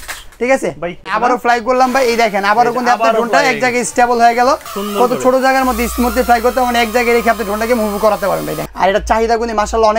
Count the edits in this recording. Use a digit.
3